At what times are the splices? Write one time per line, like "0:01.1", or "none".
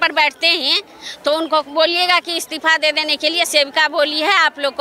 none